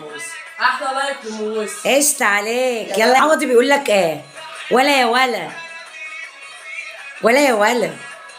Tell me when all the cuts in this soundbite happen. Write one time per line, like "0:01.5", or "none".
0:03.2